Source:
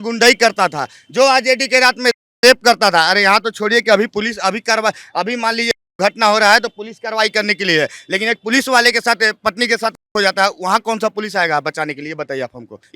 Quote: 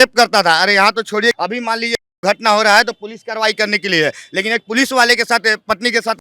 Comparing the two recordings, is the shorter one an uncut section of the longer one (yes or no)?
no